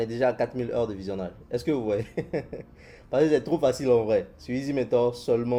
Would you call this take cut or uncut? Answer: uncut